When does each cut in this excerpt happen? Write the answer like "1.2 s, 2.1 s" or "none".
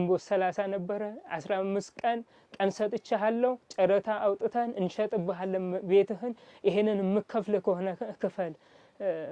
none